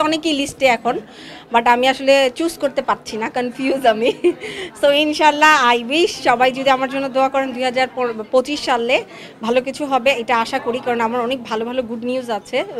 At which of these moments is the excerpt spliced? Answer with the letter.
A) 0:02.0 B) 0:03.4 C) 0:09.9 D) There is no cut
D